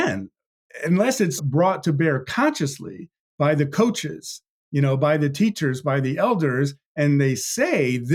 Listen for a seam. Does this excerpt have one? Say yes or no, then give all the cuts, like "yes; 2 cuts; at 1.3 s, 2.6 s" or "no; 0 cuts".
yes; 1 cut; at 1.4 s